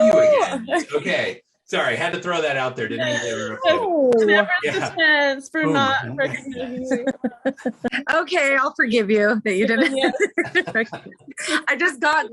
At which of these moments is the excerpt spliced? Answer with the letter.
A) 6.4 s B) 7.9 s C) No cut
B